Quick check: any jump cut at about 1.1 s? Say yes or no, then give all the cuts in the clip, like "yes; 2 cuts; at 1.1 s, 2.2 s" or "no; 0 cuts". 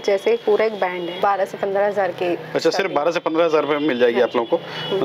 yes; 1 cut; at 1.1 s